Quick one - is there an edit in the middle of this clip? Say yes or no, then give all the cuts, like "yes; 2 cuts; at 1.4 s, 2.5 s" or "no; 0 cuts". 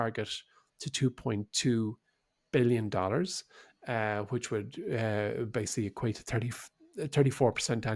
no; 0 cuts